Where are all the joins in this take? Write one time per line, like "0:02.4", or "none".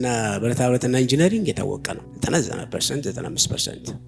0:02.0